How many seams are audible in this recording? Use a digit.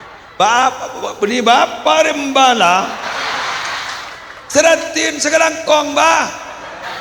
0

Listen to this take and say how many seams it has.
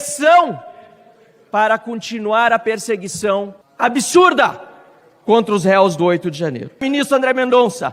2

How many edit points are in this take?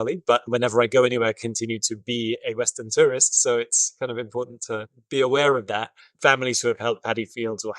1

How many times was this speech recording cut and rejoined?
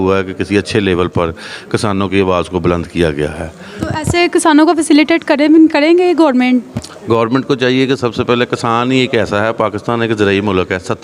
0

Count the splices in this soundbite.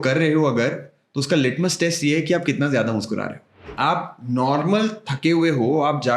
1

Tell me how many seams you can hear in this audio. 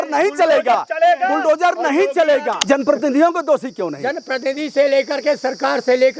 1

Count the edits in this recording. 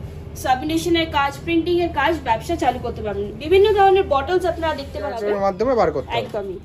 1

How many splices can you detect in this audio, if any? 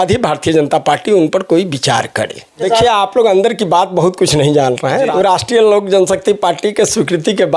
2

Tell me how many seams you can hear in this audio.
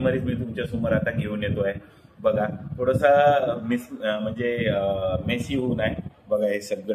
0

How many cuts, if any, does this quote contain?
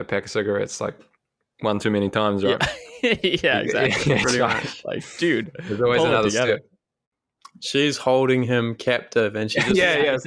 1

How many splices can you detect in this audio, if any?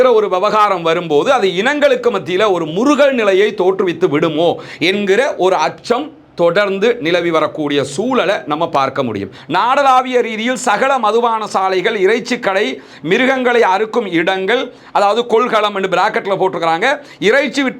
1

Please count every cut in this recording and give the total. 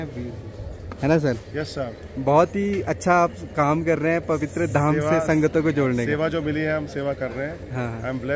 0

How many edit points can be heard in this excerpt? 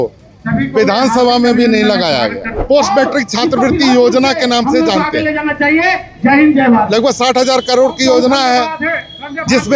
1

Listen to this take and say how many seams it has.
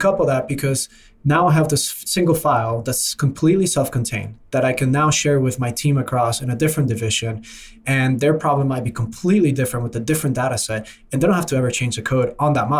0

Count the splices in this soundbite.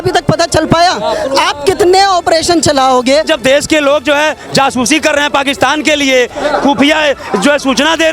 1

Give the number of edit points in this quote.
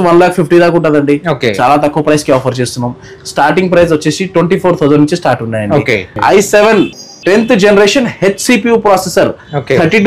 1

